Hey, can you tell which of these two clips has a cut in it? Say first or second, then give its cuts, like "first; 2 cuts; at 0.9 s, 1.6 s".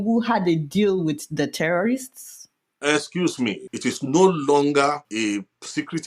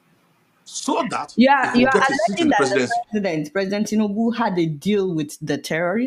first; 2 cuts; at 3.7 s, 5.1 s